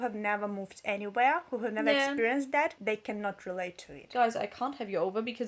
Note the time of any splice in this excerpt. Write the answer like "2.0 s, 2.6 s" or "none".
2.8 s, 4.1 s